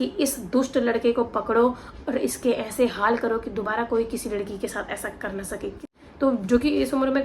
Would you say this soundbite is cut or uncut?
cut